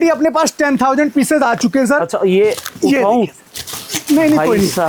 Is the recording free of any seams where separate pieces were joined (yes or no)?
yes